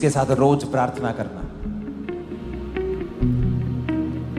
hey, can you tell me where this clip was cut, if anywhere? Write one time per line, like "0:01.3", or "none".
none